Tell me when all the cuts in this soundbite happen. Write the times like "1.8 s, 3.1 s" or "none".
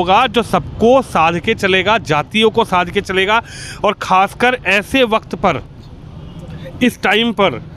none